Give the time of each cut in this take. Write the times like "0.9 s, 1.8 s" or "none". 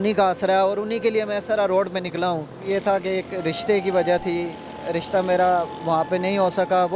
2.6 s